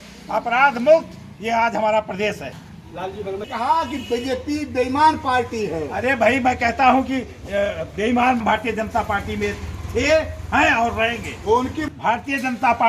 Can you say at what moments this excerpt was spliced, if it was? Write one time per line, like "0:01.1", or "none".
0:03.4
0:08.4
0:11.8